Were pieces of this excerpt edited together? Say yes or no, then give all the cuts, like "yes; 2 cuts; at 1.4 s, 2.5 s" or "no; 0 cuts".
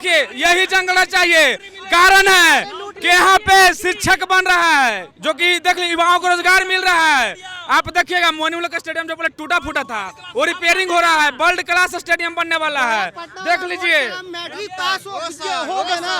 no; 0 cuts